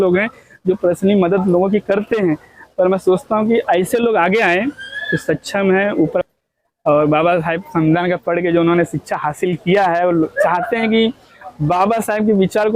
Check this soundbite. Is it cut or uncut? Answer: cut